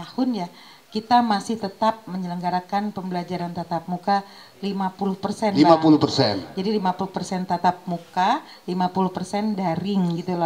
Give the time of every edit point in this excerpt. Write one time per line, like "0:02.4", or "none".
none